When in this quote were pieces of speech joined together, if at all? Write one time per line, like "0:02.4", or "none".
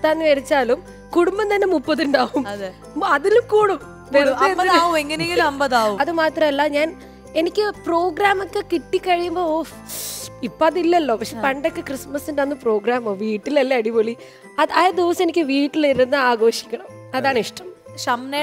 none